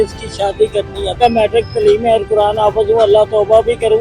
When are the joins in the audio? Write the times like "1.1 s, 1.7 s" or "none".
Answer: 1.1 s